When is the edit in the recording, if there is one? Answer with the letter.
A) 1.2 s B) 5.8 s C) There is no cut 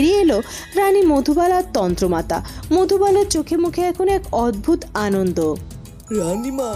C